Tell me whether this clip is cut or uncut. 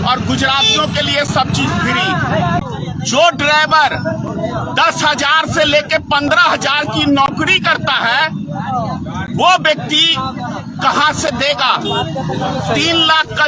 cut